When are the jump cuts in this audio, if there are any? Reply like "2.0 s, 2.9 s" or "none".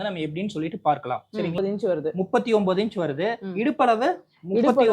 1.6 s